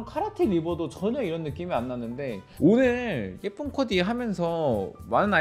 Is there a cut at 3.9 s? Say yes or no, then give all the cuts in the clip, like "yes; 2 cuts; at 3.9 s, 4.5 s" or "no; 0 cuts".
no; 1 cut; at 2.4 s